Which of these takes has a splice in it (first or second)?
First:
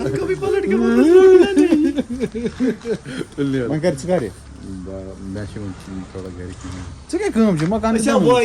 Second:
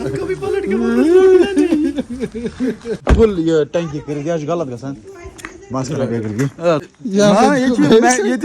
second